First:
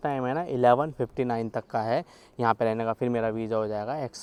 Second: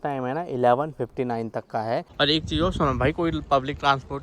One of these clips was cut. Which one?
second; 1 cut; at 2.1 s

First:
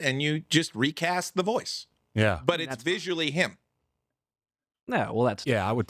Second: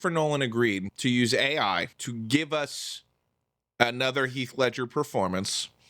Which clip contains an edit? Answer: second; 2 cuts; at 0.9 s, 2.0 s

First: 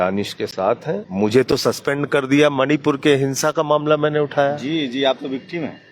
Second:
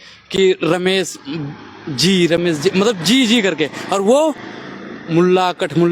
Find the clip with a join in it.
first; 1 cut; at 1.1 s

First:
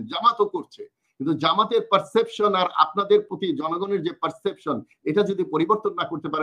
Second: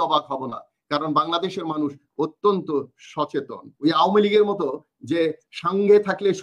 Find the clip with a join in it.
second; 1 cut; at 3.6 s

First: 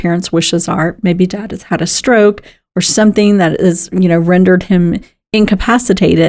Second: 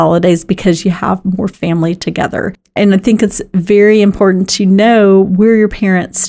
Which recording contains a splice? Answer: second; 1 cut; at 2.8 s

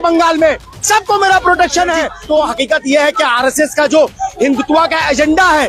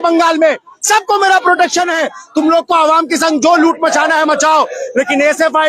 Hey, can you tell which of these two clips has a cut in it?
first; 1 cut; at 2.1 s

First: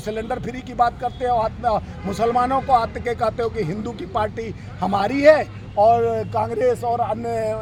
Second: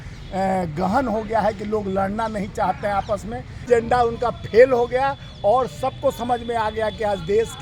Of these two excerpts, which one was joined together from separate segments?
second; 1 cut; at 3.7 s

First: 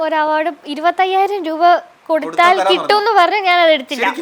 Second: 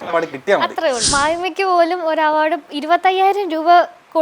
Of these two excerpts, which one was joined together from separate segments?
second; 1 cut; at 1.1 s

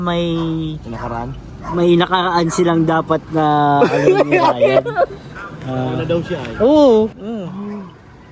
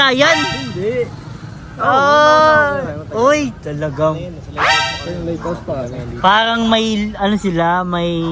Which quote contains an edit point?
first; 1 cut; at 7.2 s

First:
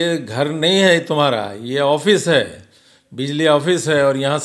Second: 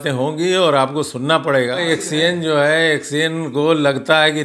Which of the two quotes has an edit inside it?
second; 1 cut; at 1.8 s

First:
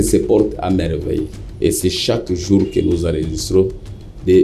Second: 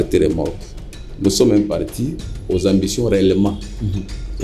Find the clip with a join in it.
first; 1 cut; at 1.4 s

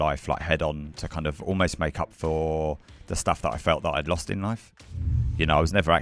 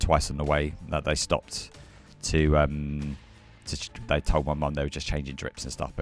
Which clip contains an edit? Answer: first; 1 cut; at 4.8 s

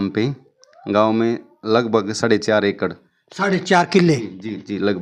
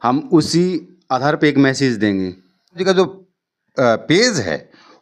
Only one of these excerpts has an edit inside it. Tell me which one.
second; 1 cut; at 2.8 s

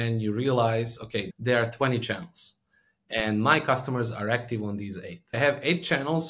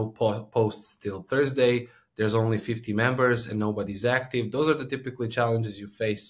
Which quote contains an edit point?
first; 2 cuts; at 1.3 s, 5.4 s

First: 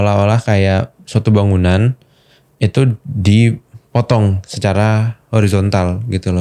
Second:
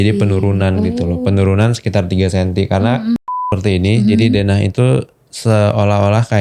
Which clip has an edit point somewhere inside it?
second; 1 cut; at 3.2 s

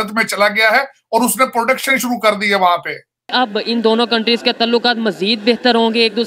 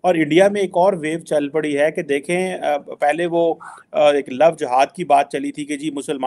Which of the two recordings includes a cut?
first; 1 cut; at 3.3 s

